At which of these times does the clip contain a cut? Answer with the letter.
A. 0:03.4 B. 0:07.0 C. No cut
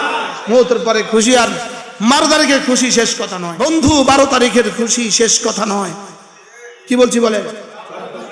A